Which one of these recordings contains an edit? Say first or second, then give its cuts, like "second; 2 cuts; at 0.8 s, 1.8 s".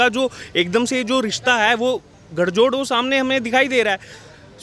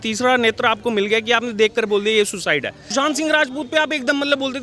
second; 1 cut; at 2.8 s